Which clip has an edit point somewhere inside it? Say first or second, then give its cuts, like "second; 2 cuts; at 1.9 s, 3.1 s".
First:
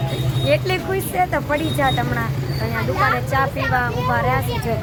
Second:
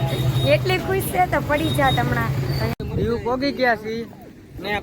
second; 1 cut; at 2.7 s